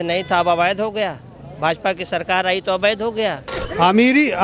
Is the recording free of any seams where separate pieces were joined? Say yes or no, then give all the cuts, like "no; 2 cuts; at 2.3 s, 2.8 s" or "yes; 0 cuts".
no; 1 cut; at 3.5 s